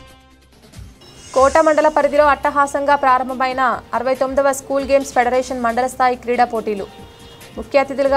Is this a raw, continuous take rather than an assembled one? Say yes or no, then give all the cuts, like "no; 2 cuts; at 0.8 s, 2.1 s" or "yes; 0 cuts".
no; 1 cut; at 0.9 s